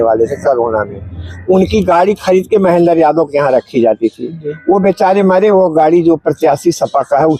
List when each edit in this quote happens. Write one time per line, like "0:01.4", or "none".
none